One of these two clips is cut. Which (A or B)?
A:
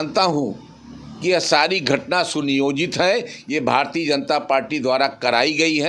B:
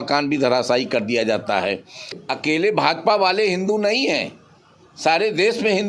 B